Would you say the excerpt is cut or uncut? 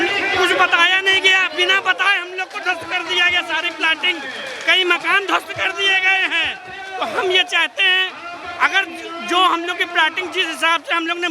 uncut